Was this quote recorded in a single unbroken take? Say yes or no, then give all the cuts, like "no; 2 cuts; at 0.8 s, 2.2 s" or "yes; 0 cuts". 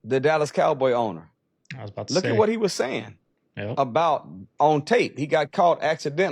yes; 0 cuts